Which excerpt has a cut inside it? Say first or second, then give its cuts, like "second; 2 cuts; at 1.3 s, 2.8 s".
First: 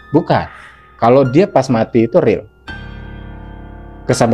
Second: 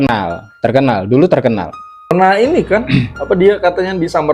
second; 1 cut; at 2.1 s